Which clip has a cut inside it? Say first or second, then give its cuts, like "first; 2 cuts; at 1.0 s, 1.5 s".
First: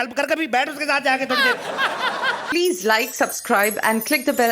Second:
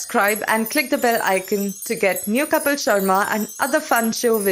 first; 1 cut; at 2.4 s